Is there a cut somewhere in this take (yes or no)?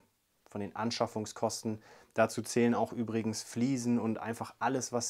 no